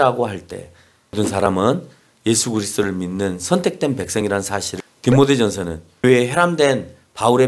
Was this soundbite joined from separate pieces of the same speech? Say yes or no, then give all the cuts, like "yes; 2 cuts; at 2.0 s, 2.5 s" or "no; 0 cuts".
yes; 3 cuts; at 1.2 s, 4.7 s, 6.0 s